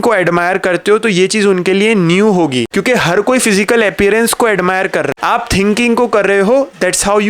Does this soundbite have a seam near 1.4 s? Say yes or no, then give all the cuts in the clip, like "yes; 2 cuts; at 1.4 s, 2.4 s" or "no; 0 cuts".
no; 2 cuts; at 2.7 s, 5.1 s